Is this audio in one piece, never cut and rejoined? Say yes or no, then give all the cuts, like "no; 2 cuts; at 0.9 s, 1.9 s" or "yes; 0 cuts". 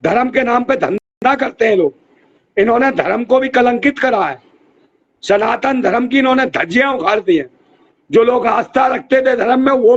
yes; 0 cuts